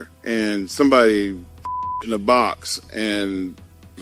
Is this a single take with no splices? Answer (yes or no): yes